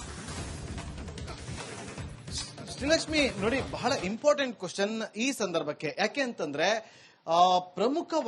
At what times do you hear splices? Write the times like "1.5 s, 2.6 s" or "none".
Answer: 1.0 s, 2.4 s